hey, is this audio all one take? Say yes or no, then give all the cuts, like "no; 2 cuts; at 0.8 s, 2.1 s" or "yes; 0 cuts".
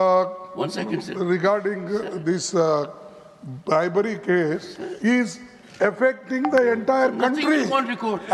yes; 0 cuts